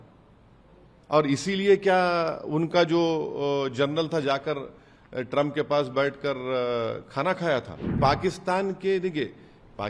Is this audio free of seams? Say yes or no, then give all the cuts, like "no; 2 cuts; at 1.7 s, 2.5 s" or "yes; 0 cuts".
no; 1 cut; at 8.0 s